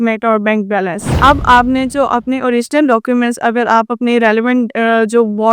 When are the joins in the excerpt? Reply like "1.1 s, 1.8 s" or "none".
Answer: 0.9 s